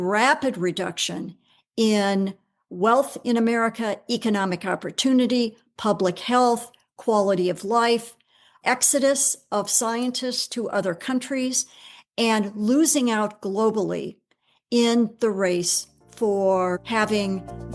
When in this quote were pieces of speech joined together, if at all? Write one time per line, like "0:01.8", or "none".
0:16.8